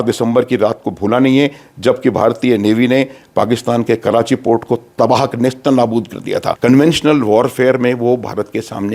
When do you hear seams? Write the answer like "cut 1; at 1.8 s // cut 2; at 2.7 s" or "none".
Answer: cut 1; at 6.6 s